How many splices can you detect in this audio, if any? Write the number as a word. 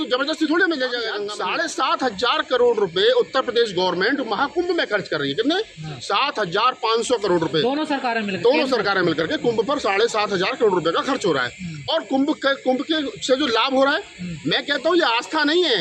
one